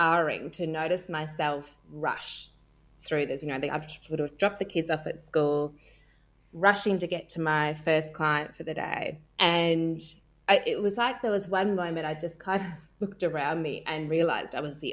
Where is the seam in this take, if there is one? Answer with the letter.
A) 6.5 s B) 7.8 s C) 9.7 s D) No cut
D